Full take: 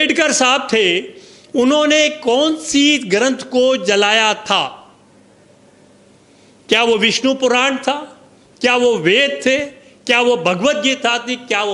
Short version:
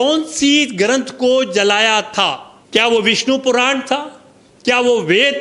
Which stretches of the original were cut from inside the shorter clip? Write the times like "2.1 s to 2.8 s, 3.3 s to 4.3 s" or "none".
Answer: 4.8 s to 6.5 s